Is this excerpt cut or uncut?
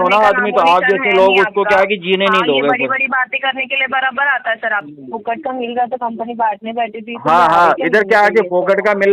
cut